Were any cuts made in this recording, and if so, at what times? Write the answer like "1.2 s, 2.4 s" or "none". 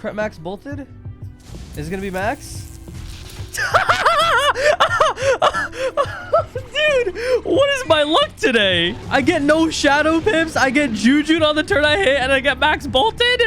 9.0 s